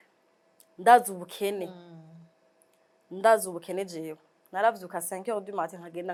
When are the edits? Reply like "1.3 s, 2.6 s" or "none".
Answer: none

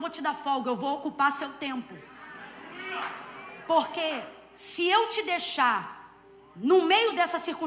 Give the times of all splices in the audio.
none

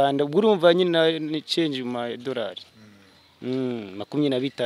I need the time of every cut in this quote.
none

